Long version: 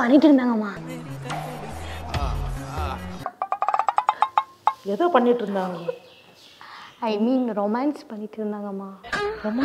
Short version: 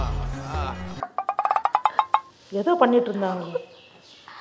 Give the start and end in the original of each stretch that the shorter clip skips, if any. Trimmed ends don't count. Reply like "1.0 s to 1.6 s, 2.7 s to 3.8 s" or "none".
4.6 s to 4.7 s